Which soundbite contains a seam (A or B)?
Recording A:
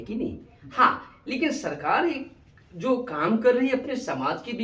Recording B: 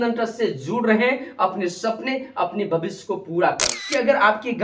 B